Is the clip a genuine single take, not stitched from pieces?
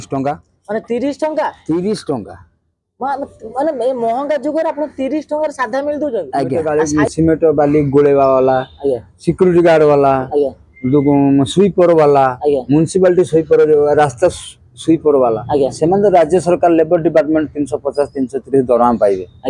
no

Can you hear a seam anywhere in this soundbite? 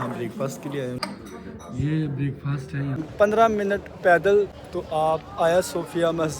yes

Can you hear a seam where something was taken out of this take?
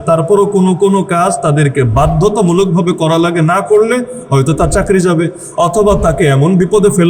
no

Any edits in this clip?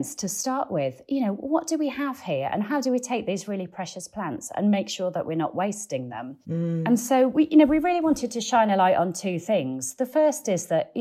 no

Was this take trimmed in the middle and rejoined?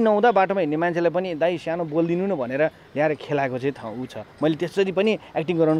no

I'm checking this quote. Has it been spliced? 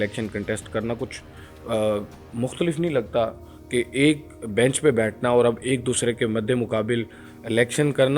no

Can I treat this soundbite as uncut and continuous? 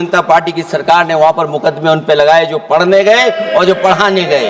yes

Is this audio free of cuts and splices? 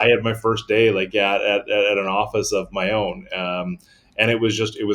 yes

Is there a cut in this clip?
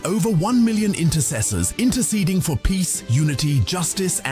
no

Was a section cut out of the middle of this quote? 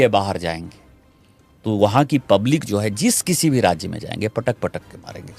no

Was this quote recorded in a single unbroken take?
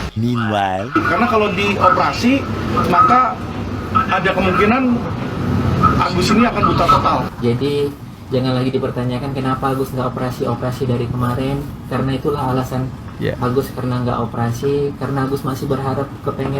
no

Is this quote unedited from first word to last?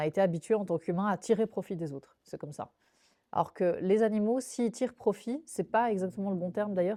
yes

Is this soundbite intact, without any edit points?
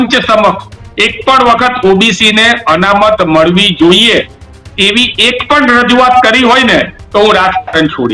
yes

